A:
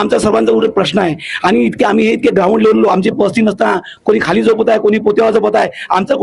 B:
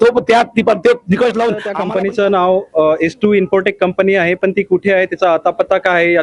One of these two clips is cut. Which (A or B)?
B